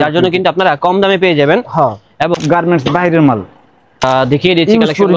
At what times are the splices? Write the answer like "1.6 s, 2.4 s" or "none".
2.4 s, 4.0 s